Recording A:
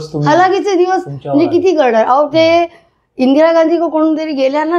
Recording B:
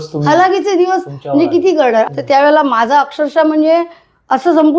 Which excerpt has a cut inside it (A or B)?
B